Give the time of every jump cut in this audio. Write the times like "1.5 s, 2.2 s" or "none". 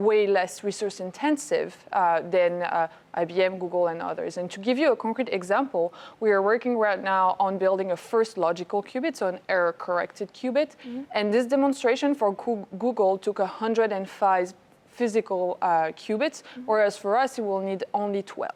none